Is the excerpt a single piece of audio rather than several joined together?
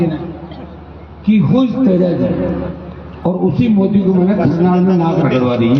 yes; 0 cuts

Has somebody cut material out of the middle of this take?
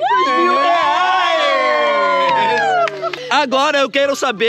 yes; 1 cut; at 3.1 s

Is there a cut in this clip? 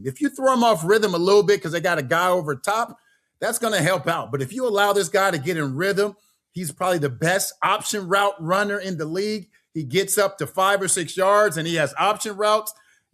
no; 0 cuts

